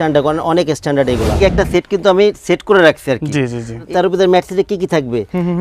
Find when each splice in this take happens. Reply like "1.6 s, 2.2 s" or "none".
1.4 s, 3.8 s